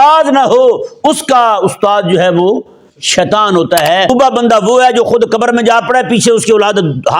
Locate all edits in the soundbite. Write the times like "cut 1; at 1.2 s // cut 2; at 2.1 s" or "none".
cut 1; at 4.1 s